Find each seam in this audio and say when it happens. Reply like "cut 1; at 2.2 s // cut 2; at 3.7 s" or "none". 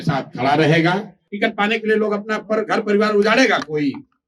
cut 1; at 1.2 s